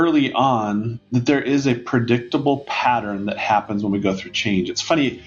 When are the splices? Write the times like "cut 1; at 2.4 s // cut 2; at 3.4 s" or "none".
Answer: none